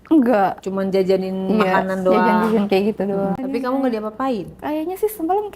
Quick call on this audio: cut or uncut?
cut